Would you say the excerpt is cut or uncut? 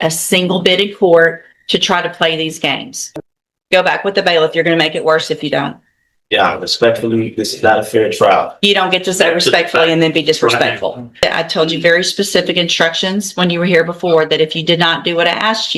cut